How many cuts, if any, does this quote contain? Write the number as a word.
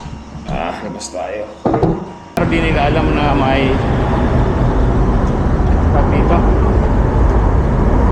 one